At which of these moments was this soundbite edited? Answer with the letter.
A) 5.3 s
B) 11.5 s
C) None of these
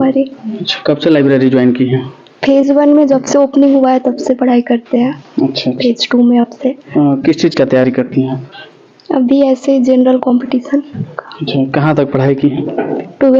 C